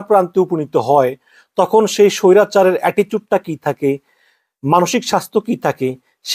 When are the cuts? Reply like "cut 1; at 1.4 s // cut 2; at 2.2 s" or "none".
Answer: none